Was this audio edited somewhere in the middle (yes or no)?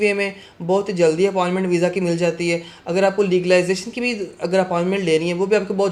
no